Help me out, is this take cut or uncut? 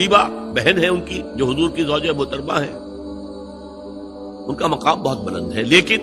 uncut